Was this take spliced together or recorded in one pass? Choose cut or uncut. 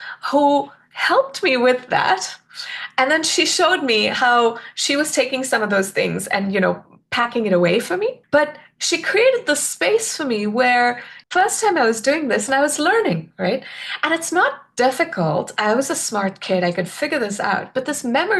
cut